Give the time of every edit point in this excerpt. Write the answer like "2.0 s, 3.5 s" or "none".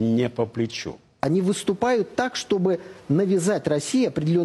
1.2 s